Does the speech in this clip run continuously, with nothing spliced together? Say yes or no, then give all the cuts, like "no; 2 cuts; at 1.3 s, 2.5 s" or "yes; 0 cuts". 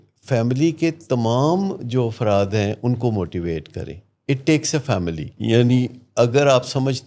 no; 1 cut; at 5.3 s